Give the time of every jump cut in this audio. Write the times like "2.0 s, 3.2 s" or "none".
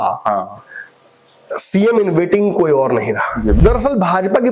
3.6 s

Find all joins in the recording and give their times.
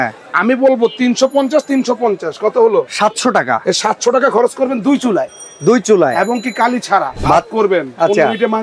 7.1 s

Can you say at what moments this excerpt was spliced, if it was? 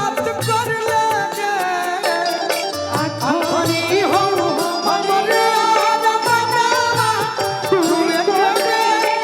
none

